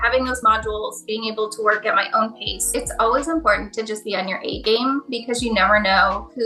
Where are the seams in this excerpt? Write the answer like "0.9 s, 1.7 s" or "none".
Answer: 2.5 s